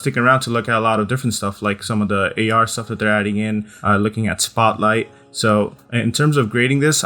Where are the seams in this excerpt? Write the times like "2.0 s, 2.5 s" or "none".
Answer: 3.7 s, 5.5 s